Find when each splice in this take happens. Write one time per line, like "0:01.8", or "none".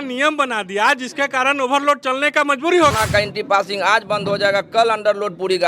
0:02.9